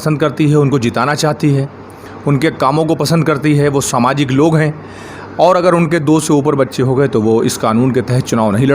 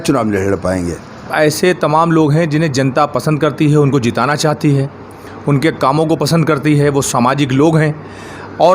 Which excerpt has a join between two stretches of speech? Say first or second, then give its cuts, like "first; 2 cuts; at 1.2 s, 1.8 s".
second; 1 cut; at 1.3 s